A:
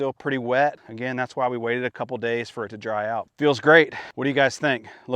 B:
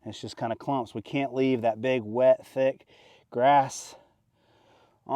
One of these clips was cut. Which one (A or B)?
A